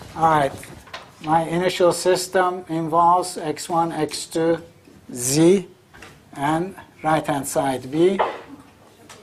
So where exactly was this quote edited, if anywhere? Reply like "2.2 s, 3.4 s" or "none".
none